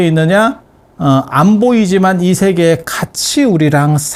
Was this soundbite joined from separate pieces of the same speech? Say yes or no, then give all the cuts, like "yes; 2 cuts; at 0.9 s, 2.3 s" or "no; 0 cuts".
no; 0 cuts